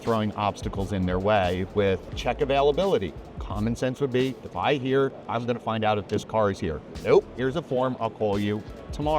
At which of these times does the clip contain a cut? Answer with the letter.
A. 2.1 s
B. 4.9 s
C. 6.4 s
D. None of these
A